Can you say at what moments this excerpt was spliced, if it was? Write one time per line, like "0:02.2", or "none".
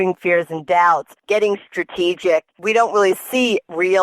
0:01.1
0:02.6